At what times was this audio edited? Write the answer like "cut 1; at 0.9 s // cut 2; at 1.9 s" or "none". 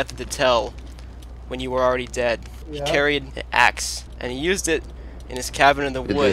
cut 1; at 2.6 s // cut 2; at 3.4 s // cut 3; at 4.0 s